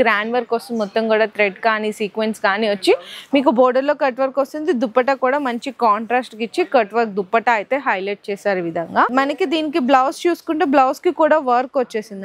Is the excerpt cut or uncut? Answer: uncut